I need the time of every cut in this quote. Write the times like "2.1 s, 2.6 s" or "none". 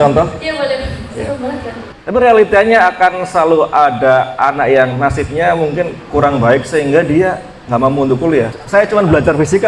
1.8 s, 8.6 s